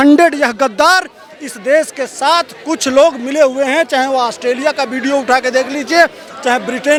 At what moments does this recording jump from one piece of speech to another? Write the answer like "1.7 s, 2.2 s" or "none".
none